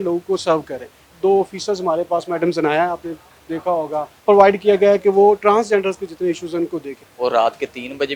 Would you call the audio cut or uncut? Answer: cut